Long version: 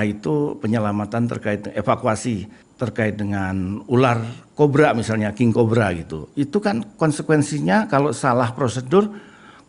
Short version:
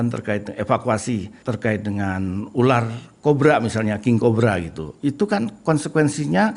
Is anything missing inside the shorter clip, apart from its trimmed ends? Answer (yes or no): yes